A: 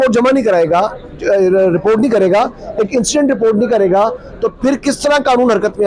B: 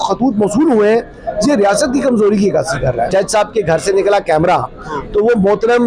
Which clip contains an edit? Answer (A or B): B